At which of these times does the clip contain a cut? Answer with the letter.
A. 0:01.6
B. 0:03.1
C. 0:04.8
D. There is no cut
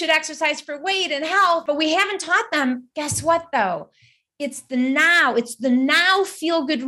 A